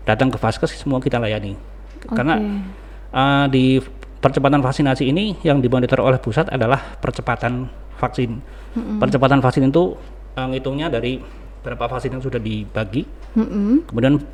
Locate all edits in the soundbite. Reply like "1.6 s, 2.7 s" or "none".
none

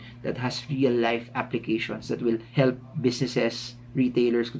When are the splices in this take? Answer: 2.5 s

